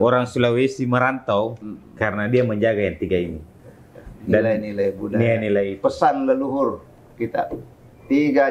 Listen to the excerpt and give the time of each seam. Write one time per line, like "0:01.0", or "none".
none

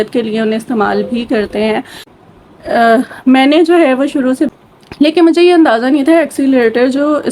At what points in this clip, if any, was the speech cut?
0:04.5

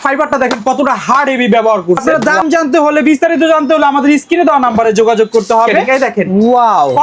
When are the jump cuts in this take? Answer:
0:02.0
0:05.8

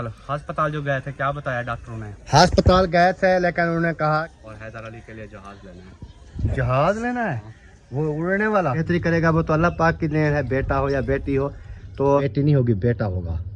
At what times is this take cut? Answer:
0:04.3
0:08.8
0:12.3

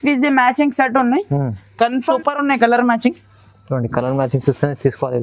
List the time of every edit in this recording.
0:02.2

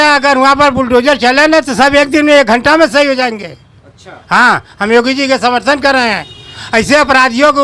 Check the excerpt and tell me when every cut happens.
none

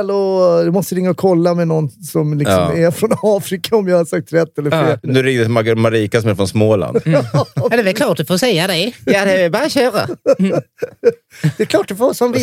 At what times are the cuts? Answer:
0:05.1

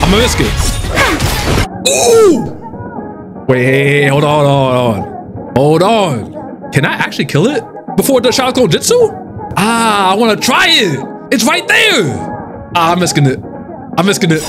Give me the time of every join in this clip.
0:06.6
0:07.8

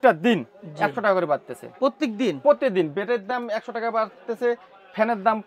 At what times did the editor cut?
none

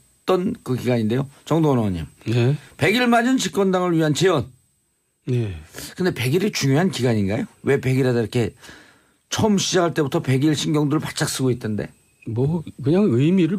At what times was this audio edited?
none

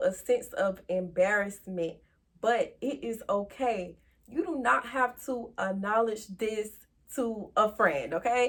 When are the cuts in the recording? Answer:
none

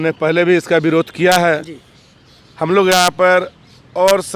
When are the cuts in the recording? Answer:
none

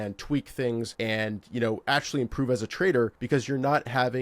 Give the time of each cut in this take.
0:00.9
0:03.2

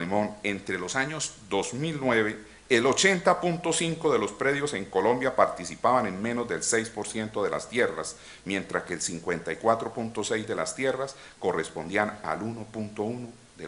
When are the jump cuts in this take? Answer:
none

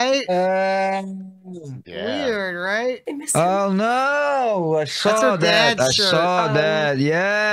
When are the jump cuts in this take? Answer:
0:03.0

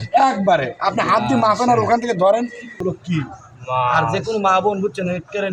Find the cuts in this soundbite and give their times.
0:02.8

